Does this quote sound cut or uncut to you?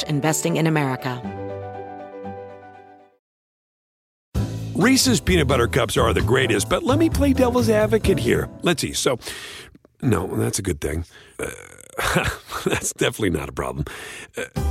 cut